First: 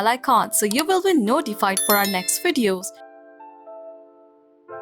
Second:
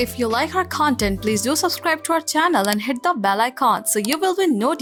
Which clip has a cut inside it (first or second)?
first